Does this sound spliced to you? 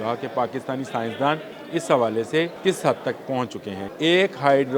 yes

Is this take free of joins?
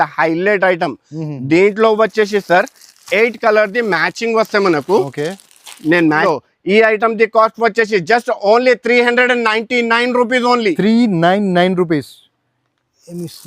no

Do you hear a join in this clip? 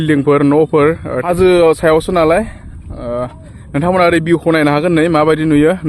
yes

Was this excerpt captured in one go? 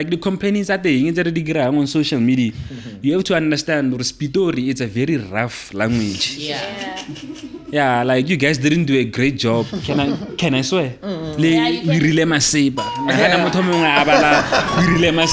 yes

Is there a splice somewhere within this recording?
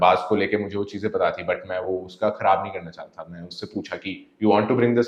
no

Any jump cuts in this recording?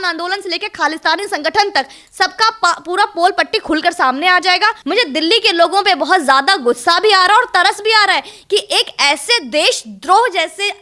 yes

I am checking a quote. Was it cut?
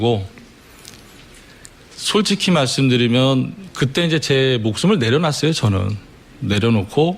no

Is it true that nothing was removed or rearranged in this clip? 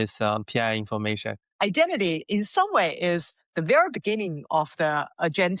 no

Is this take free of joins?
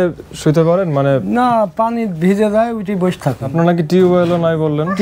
no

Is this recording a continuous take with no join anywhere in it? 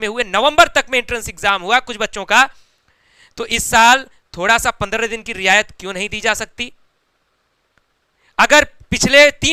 yes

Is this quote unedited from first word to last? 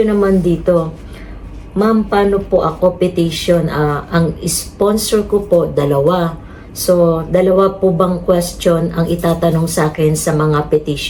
yes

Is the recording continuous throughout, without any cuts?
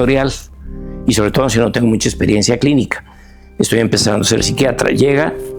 yes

